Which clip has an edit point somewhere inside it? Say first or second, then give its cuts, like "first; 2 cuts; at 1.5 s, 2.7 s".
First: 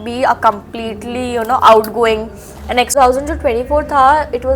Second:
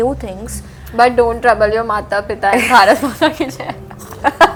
first; 1 cut; at 2.9 s